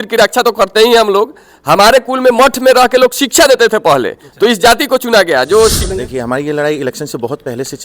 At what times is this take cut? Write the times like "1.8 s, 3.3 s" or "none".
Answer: 5.9 s